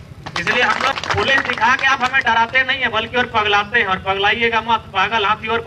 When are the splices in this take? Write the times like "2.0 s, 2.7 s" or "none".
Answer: 0.9 s